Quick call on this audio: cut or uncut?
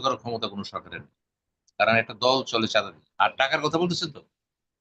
cut